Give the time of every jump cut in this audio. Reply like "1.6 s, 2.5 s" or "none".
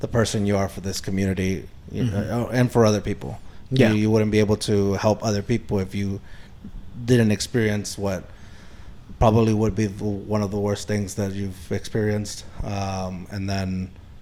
none